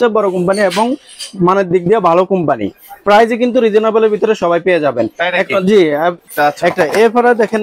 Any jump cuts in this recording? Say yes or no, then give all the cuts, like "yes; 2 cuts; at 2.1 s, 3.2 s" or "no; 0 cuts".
yes; 1 cut; at 6.2 s